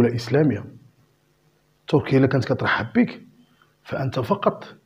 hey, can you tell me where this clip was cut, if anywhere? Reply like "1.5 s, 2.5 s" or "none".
none